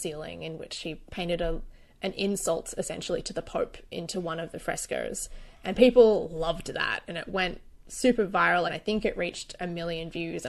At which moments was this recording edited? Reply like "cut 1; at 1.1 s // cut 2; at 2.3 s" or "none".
cut 1; at 8.7 s